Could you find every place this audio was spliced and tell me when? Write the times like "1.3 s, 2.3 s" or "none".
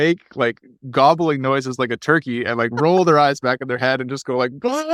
none